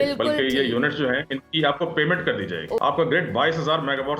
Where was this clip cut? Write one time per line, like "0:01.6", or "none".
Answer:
0:02.8

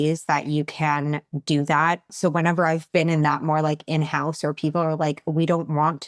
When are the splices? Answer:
0:02.1

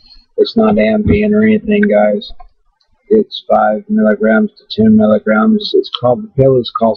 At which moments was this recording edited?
0:02.1

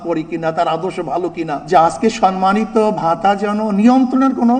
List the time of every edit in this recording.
0:01.6

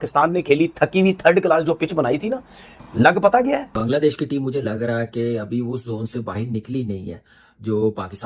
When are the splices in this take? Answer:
0:03.7

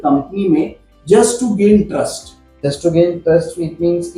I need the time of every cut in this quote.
none

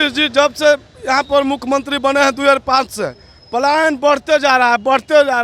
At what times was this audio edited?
none

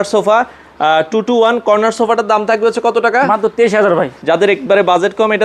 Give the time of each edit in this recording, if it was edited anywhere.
0:04.2

